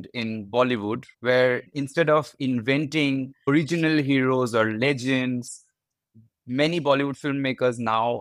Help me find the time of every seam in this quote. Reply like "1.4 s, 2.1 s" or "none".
5.5 s